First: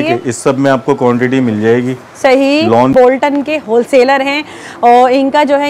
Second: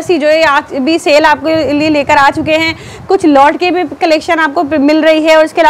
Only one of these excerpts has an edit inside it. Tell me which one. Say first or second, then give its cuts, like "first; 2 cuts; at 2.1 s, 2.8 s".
first; 1 cut; at 2.9 s